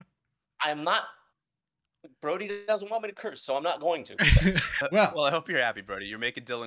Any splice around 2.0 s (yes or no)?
no